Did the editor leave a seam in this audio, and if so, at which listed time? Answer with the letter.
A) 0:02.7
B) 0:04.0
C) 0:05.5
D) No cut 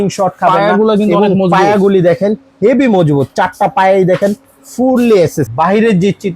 C